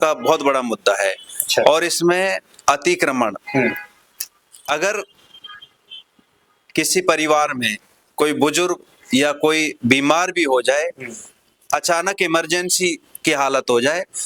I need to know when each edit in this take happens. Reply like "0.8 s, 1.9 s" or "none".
none